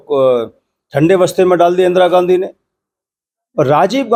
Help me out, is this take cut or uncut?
uncut